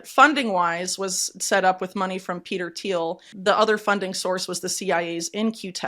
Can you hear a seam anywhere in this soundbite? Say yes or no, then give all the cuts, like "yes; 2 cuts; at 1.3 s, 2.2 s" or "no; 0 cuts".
yes; 1 cut; at 3.3 s